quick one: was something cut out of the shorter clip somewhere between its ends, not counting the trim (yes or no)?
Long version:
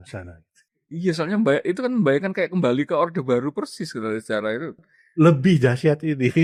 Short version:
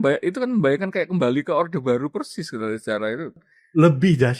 no